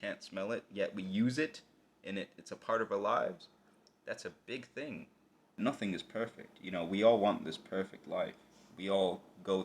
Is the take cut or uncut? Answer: cut